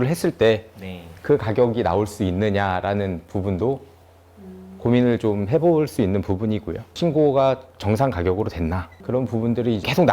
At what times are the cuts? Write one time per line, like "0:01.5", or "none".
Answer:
0:06.9